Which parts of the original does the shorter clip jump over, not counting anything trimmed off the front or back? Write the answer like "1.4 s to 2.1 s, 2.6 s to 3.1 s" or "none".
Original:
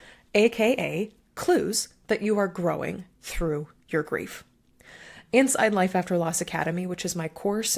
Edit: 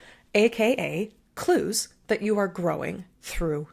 none